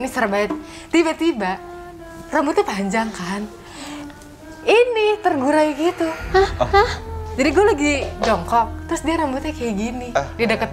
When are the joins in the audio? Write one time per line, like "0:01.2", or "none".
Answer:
none